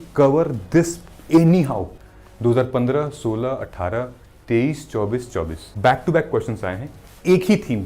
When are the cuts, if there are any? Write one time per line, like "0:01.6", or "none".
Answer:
0:01.9
0:05.6